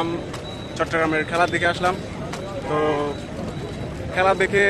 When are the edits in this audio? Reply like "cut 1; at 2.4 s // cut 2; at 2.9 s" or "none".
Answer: none